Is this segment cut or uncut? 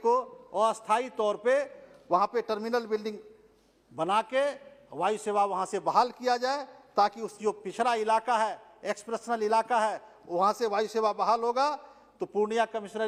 uncut